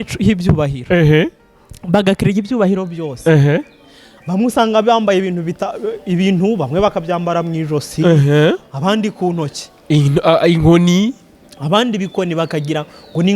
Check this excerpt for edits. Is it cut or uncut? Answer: uncut